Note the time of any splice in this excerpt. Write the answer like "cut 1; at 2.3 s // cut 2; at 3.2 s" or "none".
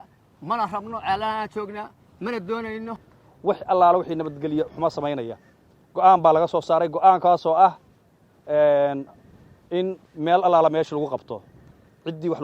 cut 1; at 2.9 s